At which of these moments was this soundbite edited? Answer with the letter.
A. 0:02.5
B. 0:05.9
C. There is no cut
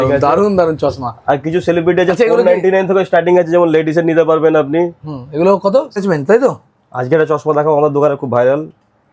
B